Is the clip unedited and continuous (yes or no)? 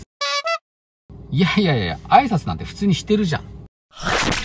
yes